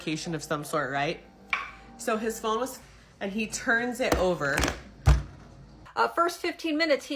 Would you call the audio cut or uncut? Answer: cut